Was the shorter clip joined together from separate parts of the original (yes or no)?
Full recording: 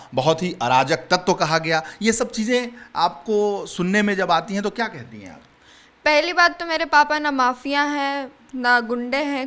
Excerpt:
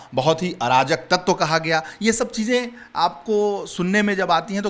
no